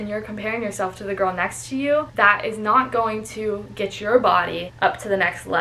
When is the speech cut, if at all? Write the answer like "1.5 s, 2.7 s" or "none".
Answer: 2.1 s, 4.7 s